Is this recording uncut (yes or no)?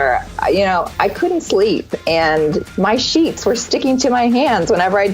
no